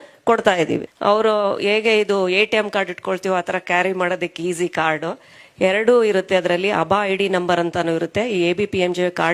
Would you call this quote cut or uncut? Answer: cut